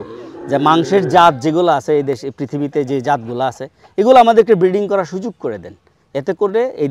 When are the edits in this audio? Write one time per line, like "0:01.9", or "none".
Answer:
none